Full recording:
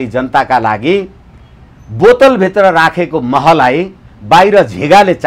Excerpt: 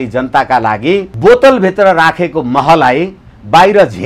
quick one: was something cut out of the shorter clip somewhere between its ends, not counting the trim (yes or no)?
yes